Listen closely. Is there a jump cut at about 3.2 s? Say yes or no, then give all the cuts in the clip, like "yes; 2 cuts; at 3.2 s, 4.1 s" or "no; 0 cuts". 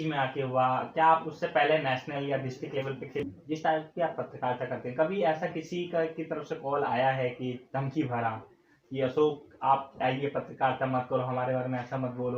yes; 1 cut; at 3.2 s